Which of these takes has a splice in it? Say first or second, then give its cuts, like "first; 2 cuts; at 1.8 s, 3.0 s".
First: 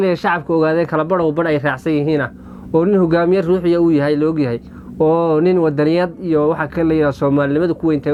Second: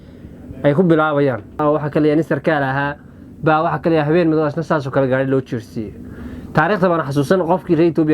second; 1 cut; at 1.5 s